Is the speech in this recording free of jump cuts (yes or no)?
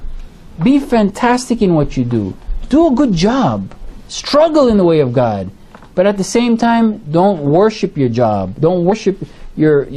no